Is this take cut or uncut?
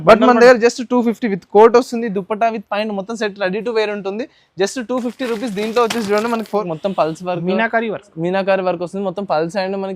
cut